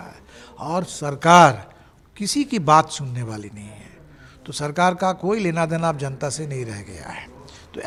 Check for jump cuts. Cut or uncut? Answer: uncut